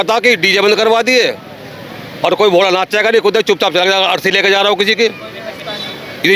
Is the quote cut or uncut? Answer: uncut